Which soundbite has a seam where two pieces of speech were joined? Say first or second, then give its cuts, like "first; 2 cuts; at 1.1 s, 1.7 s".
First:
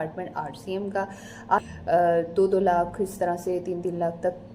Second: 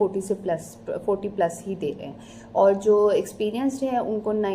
first; 1 cut; at 1.6 s